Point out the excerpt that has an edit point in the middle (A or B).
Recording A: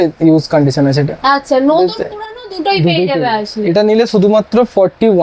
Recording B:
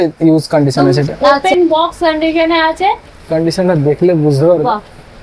B